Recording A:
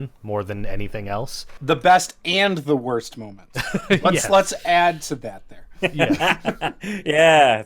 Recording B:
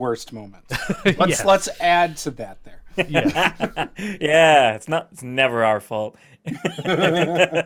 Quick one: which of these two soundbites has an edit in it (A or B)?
A